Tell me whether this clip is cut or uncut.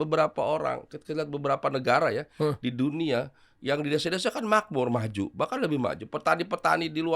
uncut